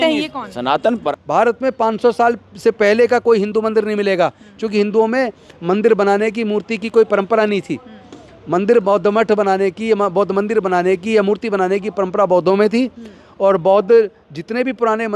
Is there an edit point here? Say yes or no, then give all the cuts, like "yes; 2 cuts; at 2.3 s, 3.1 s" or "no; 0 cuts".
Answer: yes; 1 cut; at 1.0 s